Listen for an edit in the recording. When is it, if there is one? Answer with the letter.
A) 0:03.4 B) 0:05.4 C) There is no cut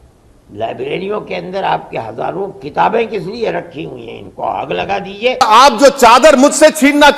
B